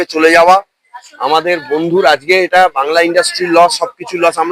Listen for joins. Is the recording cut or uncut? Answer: uncut